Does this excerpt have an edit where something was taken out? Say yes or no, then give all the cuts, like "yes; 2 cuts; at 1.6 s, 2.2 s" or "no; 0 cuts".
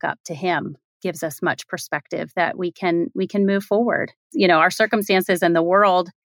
yes; 1 cut; at 4.3 s